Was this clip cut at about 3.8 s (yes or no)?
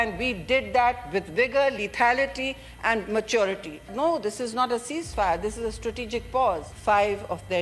yes